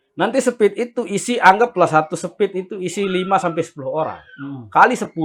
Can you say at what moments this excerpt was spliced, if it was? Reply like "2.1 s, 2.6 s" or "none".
none